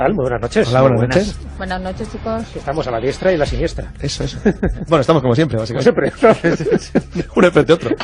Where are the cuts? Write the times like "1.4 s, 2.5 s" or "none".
6.3 s